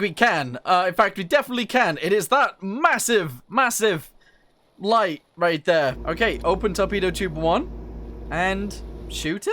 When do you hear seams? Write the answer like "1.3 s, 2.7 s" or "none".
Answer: 6.0 s